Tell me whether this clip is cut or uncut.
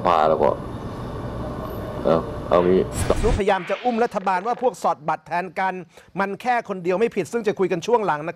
cut